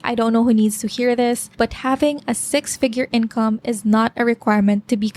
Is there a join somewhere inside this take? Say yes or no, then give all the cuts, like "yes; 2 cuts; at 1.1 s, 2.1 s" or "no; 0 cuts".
yes; 1 cut; at 1.5 s